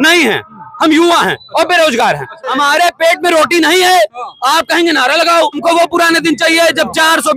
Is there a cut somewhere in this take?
yes; 2 cuts; at 2.5 s, 5.6 s

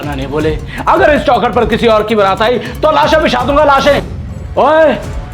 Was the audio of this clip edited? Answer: yes; 1 cut; at 4.1 s

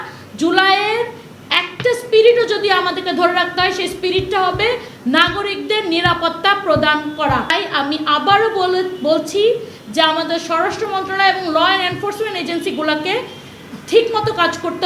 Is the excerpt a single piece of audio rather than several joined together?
no; 1 cut; at 7.5 s

